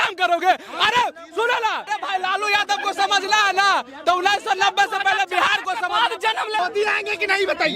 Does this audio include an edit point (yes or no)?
yes